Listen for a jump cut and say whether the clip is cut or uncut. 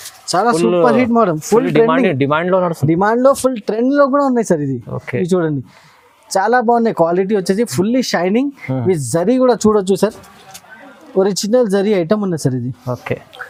uncut